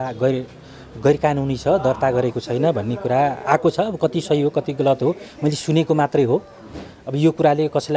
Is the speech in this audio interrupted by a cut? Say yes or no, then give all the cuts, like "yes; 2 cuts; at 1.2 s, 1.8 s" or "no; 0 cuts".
no; 0 cuts